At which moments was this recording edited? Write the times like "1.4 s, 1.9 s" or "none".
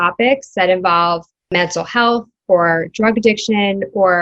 1.5 s